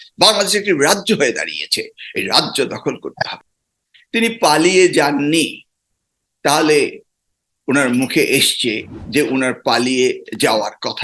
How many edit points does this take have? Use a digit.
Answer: 1